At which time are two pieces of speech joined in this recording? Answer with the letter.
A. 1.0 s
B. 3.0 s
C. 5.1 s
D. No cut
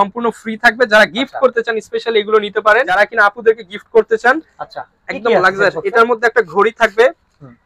B